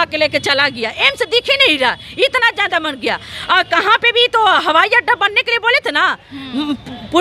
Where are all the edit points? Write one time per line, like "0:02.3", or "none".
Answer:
none